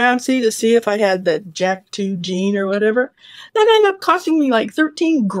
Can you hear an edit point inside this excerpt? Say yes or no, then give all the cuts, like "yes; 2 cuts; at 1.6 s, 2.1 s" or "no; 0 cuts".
no; 0 cuts